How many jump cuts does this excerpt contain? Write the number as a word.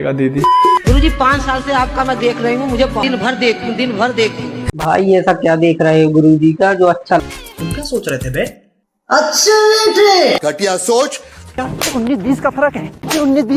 three